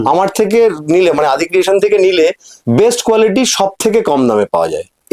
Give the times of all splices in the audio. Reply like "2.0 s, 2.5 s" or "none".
2.5 s